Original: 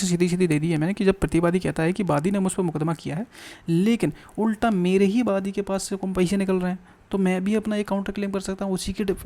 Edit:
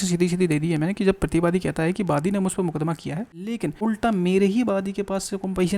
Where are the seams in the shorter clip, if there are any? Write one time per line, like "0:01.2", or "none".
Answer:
0:03.6